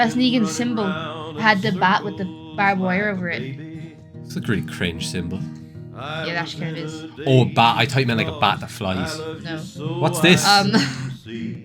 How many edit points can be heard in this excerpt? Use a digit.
0